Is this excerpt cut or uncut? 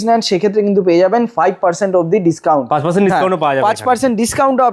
uncut